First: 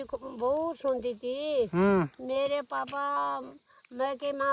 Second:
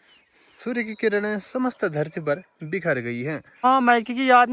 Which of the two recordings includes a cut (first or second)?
second